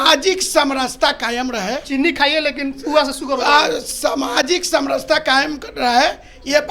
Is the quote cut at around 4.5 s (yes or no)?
no